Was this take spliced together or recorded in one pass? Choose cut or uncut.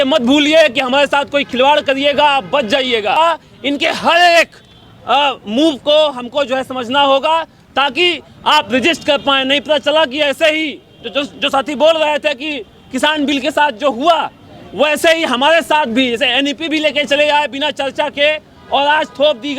cut